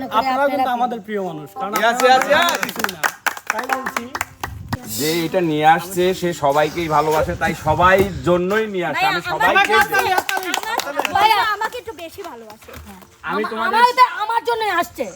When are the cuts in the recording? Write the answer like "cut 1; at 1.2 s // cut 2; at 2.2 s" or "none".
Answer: cut 1; at 4.8 s